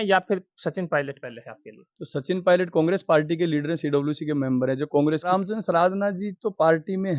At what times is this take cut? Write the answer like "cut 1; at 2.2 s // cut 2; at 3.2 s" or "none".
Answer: cut 1; at 5.3 s